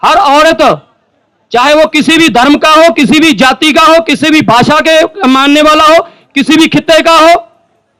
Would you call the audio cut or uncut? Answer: uncut